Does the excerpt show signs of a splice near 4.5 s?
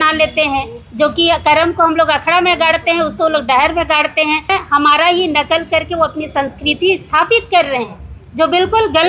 yes; 1 cut; at 4.5 s

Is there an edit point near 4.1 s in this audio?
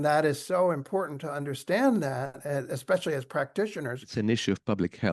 yes; 1 cut; at 4.1 s

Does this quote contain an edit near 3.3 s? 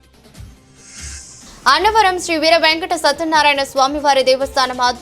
no; 1 cut; at 1.4 s

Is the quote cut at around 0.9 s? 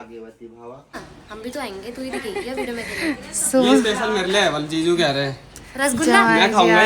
yes; 1 cut; at 0.9 s

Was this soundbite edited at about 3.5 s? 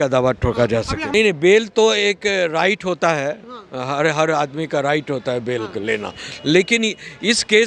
no; 1 cut; at 1.0 s

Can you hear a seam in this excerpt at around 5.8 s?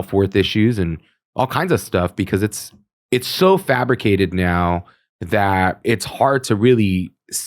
yes; 1 cut; at 5.8 s

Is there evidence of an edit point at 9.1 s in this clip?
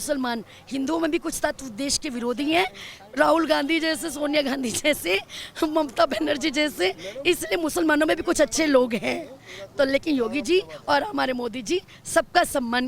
no; 0 cuts

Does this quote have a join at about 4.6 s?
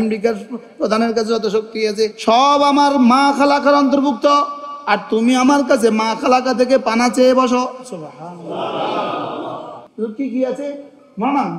no; 0 cuts

